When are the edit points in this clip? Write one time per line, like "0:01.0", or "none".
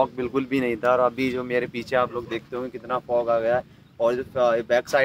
none